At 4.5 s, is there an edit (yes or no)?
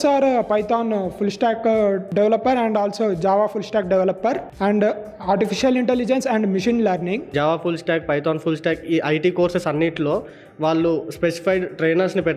yes